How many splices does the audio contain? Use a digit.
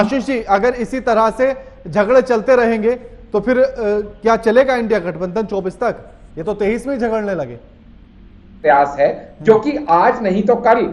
1